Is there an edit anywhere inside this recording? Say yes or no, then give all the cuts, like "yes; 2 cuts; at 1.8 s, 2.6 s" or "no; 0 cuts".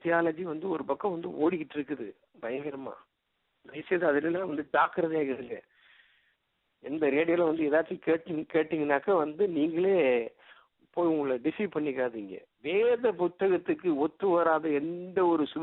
no; 0 cuts